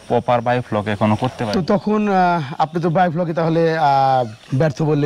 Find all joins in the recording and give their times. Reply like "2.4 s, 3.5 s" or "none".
1.4 s